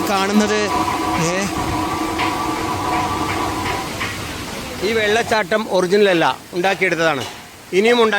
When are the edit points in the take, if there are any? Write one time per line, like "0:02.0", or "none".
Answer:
0:04.8